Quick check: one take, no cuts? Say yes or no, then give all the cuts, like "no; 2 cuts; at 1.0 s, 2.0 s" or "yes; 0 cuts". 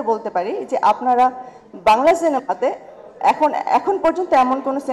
yes; 0 cuts